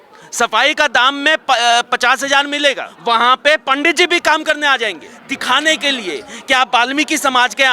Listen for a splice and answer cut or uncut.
cut